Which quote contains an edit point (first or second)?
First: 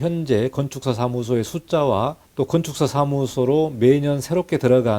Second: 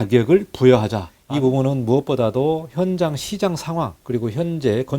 second